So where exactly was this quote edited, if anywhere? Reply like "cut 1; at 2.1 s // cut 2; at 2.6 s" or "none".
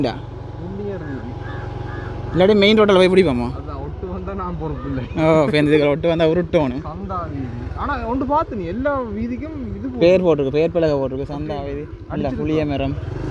none